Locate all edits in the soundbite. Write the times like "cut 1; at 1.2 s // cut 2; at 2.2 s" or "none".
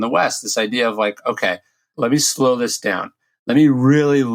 cut 1; at 1.8 s